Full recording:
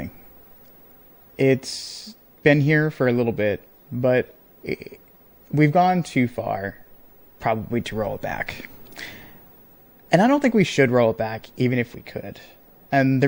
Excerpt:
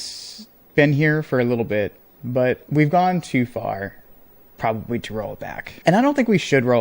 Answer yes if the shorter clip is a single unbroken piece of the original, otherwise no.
no